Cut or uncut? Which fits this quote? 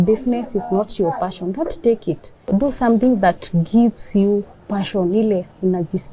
cut